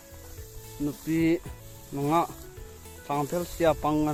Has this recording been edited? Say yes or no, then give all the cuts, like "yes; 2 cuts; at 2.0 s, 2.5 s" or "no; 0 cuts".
no; 0 cuts